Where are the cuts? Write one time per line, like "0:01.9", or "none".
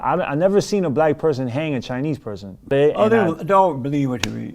0:02.7